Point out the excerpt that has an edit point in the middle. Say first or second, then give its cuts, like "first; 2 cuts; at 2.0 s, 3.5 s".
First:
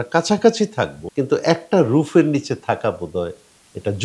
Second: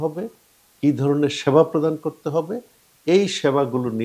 first; 1 cut; at 1.0 s